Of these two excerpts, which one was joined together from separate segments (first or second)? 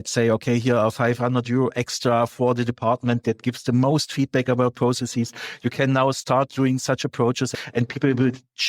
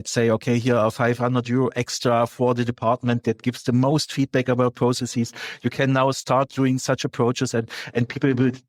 first